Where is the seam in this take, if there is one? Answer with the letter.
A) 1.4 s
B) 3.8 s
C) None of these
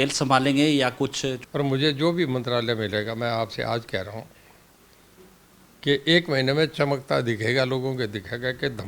A